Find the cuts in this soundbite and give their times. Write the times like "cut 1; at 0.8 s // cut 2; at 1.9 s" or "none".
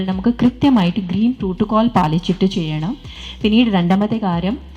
cut 1; at 3.2 s